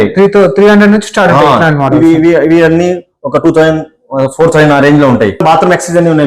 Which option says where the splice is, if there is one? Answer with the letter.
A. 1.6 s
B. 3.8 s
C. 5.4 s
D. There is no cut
C